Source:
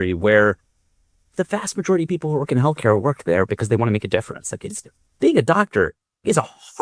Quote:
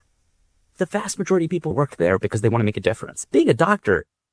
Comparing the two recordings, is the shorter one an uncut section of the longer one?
no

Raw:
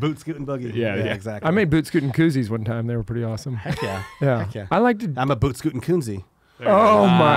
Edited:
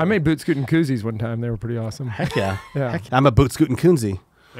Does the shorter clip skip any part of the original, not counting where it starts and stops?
yes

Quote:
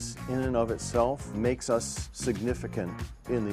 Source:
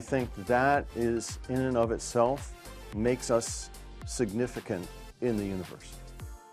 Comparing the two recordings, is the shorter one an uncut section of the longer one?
no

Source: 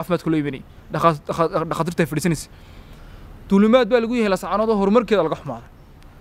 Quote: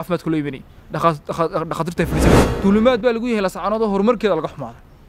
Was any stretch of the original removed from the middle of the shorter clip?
yes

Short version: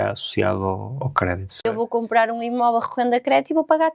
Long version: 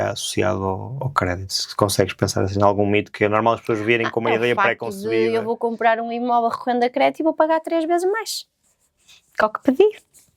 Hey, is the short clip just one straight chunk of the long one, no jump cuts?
no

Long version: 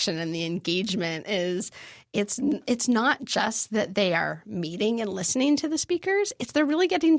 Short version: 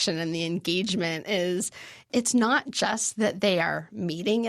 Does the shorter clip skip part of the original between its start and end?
yes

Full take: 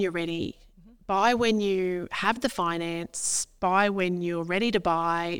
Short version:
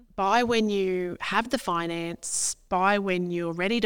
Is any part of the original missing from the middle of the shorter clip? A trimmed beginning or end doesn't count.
no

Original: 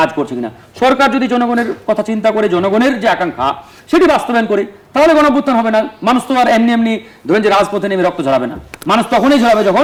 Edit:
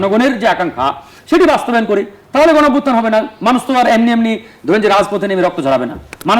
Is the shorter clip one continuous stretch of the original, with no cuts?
yes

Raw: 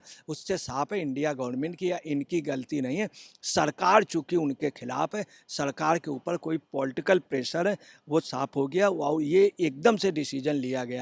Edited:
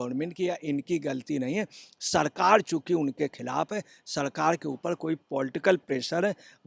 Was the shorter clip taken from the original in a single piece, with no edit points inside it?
yes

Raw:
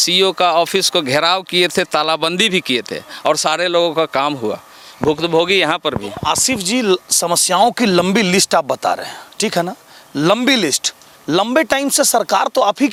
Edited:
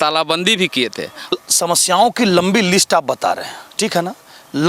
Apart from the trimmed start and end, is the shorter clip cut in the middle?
yes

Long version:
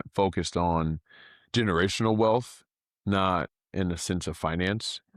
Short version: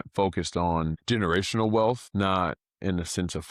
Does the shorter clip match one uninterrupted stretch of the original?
no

